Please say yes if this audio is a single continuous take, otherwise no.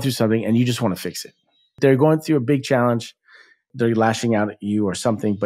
no